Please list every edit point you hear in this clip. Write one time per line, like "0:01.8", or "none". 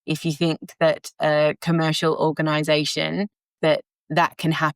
0:03.5